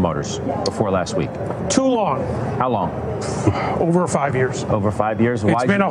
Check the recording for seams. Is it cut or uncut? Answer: uncut